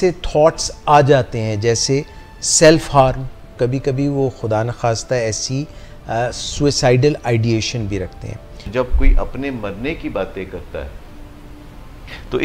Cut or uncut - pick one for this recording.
cut